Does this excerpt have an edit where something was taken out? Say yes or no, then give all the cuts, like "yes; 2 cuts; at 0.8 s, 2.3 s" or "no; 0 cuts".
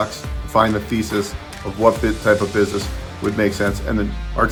no; 0 cuts